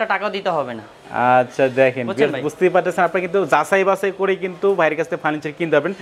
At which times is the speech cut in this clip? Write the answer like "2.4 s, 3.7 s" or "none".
none